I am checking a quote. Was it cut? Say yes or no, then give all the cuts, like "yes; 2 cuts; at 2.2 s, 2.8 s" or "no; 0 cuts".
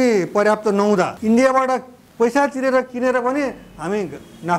yes; 1 cut; at 1.2 s